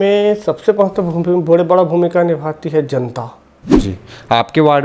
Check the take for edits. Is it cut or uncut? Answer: cut